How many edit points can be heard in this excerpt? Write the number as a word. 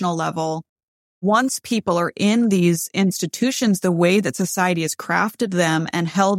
one